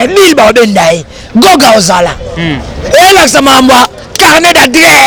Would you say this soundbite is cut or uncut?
uncut